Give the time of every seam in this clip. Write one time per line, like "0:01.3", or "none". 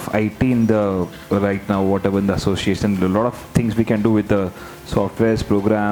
none

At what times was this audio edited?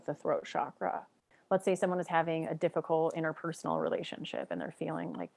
0:01.3

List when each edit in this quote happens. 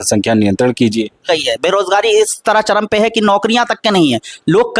0:01.3

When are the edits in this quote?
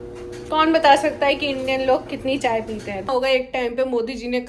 0:03.1

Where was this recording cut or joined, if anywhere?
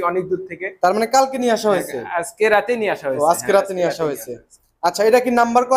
none

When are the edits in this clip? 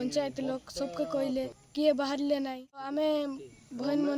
0:01.6
0:02.9

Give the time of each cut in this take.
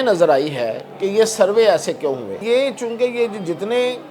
0:02.4

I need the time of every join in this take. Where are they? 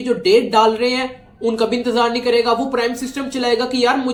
none

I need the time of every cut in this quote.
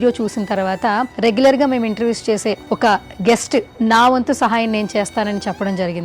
0:02.7

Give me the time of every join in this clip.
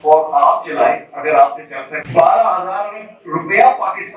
none

